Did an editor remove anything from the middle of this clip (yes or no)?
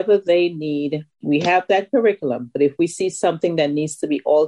yes